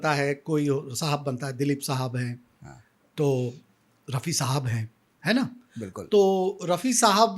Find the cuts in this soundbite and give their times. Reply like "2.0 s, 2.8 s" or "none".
none